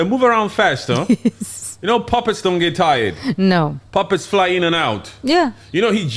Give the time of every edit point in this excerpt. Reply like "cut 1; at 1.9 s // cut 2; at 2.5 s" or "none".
none

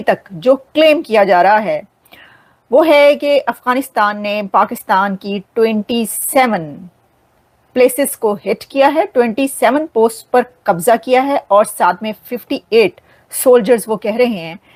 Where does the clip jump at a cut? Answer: none

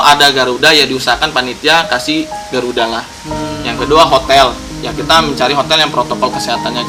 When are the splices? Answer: none

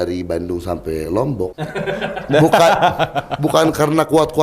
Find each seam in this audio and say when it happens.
cut 1; at 1.6 s

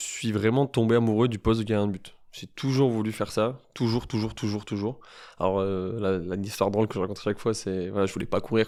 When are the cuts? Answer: none

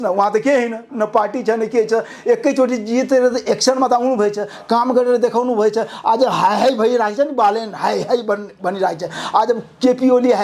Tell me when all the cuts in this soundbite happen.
none

